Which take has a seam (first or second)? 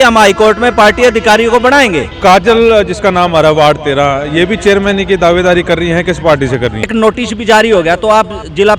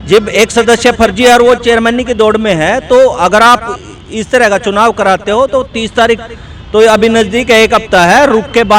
first